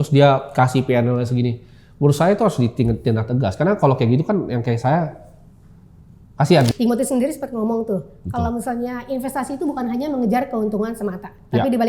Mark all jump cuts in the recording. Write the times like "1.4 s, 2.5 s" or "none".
6.7 s